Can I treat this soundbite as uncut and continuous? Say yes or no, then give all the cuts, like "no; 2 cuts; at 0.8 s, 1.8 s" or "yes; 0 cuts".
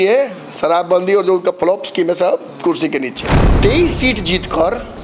no; 1 cut; at 3.4 s